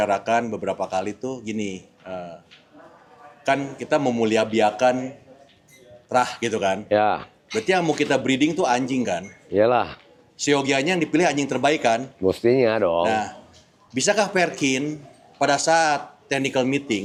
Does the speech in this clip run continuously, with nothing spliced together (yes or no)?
yes